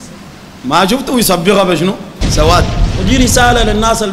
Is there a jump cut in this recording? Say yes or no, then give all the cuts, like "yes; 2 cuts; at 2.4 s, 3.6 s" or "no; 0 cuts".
yes; 1 cut; at 2.9 s